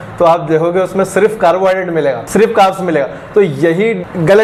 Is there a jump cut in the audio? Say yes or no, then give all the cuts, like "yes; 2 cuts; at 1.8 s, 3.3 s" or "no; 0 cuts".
no; 0 cuts